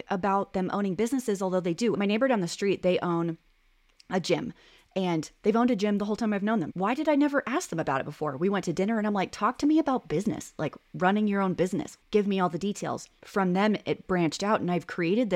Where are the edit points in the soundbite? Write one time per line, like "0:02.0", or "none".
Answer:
0:02.0
0:06.7
0:12.0
0:13.2